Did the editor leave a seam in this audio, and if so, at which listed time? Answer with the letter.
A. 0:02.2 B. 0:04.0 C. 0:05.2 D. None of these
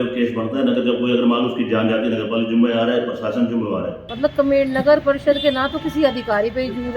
B